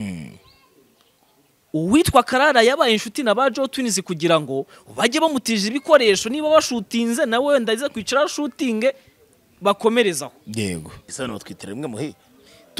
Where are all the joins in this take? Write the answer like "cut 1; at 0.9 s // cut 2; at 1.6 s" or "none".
cut 1; at 11.0 s